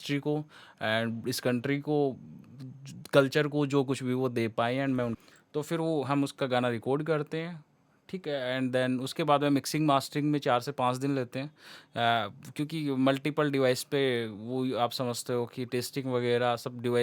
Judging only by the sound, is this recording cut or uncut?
cut